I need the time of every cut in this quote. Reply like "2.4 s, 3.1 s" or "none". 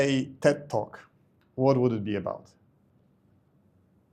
none